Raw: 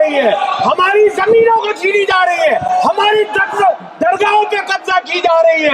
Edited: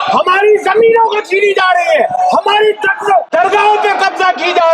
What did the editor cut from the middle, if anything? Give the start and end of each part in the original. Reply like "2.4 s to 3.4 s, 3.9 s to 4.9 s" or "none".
3.8 s to 4.0 s